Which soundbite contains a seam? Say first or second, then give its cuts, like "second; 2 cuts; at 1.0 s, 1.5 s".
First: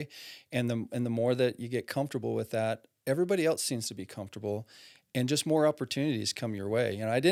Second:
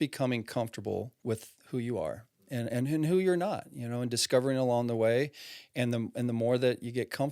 second; 1 cut; at 1.1 s